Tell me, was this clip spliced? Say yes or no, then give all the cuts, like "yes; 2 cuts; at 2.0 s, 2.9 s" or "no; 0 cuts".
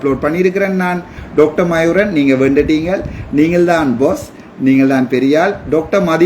yes; 1 cut; at 1.1 s